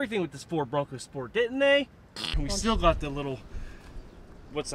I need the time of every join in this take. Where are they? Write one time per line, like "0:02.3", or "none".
0:02.4